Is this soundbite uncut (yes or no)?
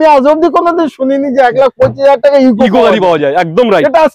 yes